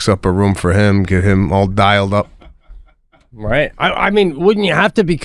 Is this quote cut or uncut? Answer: uncut